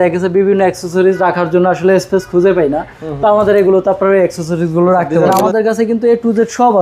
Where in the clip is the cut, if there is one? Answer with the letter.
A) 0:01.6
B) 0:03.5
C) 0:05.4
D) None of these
C